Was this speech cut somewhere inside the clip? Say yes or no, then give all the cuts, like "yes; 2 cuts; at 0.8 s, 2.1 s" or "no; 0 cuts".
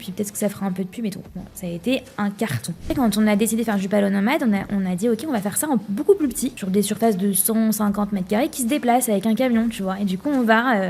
yes; 2 cuts; at 2.9 s, 6.6 s